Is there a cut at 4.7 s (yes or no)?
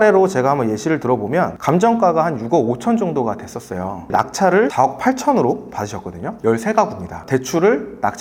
yes